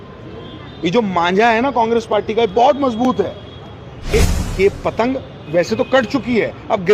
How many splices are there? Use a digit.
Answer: 1